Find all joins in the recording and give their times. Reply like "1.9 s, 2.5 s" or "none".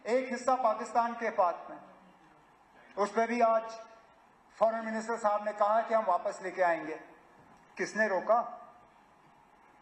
none